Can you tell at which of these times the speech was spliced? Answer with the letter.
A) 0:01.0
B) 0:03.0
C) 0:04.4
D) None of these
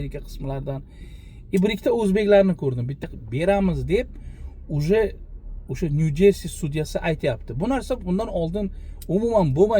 B